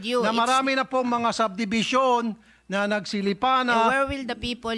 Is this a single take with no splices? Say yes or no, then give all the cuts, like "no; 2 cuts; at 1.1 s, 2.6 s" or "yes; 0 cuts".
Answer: yes; 0 cuts